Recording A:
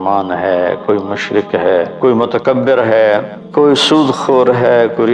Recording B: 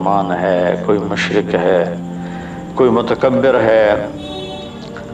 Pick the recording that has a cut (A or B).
A